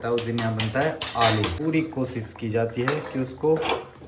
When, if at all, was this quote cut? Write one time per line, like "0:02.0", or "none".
0:01.6